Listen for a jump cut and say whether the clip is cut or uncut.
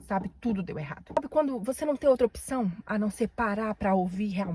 cut